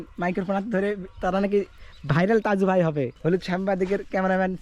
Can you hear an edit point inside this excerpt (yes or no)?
yes